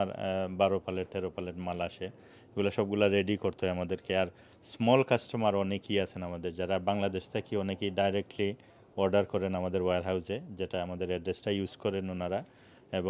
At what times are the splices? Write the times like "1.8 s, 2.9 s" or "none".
none

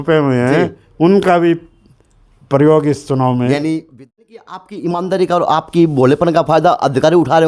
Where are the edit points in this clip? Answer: 4.0 s

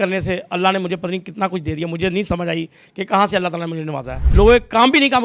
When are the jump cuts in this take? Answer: 4.2 s

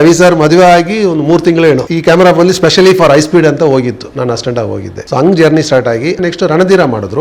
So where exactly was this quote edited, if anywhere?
1.9 s, 4.9 s, 6.2 s

